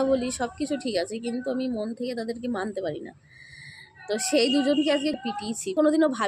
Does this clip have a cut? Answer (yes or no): yes